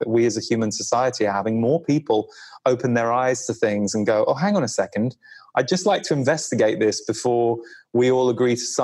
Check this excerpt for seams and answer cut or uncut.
uncut